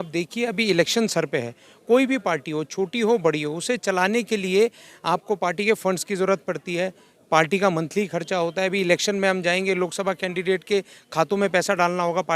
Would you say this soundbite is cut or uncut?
uncut